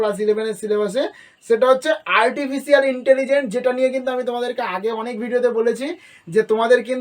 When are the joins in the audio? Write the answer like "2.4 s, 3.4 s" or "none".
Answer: none